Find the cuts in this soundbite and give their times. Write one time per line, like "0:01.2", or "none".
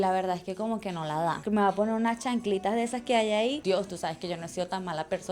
0:01.4
0:03.6